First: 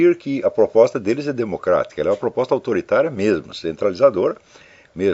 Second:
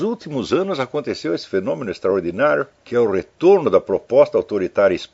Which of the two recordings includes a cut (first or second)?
second